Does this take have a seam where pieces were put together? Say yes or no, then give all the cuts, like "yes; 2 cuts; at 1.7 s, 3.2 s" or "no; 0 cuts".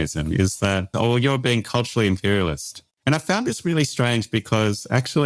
yes; 2 cuts; at 0.9 s, 2.9 s